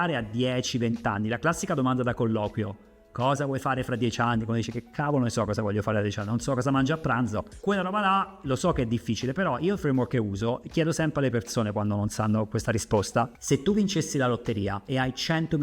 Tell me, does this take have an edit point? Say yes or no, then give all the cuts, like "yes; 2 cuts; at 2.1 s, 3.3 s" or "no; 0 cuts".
no; 0 cuts